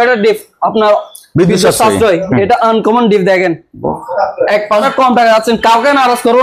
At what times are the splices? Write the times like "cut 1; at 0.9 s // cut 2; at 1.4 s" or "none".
cut 1; at 4.8 s